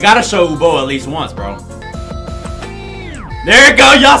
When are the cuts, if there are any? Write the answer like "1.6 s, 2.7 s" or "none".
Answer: 1.8 s

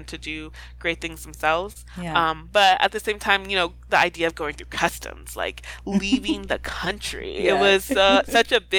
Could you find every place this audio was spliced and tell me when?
none

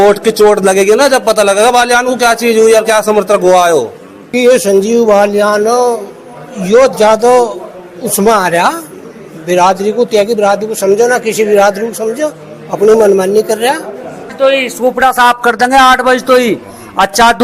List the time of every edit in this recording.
4.3 s, 14.2 s

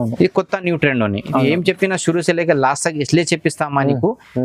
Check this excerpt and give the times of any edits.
none

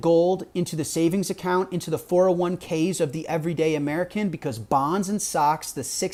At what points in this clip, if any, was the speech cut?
none

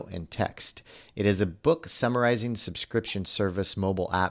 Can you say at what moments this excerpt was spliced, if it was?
none

